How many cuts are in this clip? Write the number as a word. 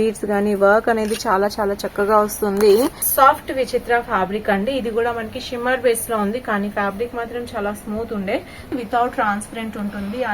two